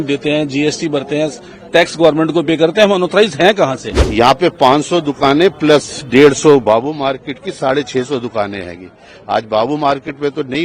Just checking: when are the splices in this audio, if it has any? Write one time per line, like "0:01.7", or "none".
0:04.1